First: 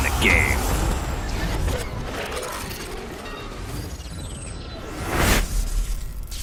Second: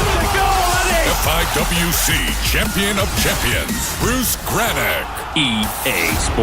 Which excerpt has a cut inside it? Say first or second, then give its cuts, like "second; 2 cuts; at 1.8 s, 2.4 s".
second; 1 cut; at 4.6 s